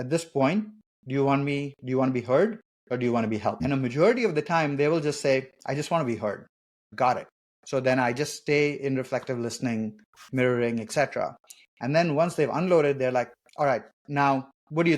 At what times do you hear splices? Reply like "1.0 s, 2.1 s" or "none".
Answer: 3.6 s